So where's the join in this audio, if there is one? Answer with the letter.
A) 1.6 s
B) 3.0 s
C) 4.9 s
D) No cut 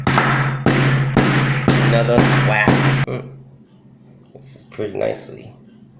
B